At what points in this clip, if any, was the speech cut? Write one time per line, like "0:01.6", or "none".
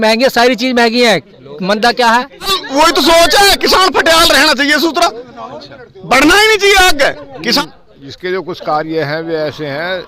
0:02.6
0:07.6